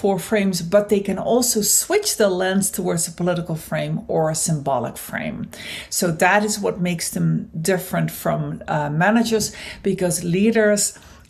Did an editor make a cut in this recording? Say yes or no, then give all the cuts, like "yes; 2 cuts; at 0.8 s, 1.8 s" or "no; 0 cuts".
no; 0 cuts